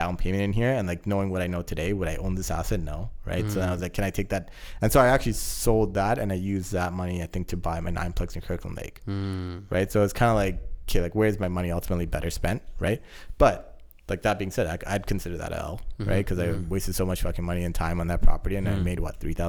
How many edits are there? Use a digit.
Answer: 0